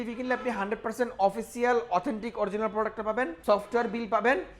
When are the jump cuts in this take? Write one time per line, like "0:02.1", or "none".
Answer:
0:03.4